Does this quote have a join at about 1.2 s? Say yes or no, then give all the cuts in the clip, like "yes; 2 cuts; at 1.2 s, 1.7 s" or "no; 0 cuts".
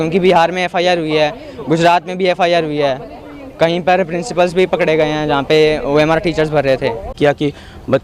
no; 1 cut; at 7.1 s